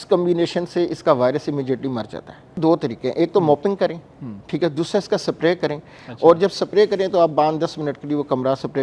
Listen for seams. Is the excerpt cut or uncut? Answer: cut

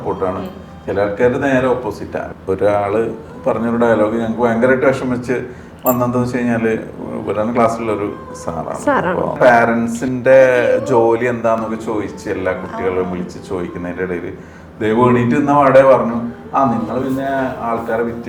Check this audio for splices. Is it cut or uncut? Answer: cut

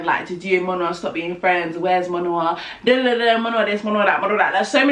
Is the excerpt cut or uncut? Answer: uncut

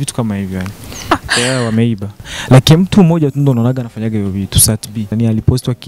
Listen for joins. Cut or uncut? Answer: cut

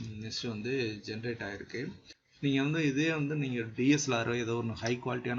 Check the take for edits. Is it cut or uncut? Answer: uncut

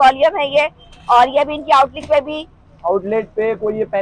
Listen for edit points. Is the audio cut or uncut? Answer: uncut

